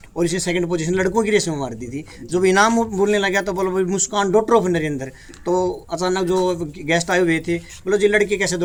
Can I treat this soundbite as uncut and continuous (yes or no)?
yes